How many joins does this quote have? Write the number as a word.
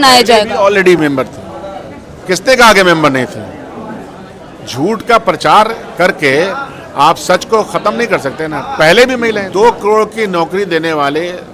one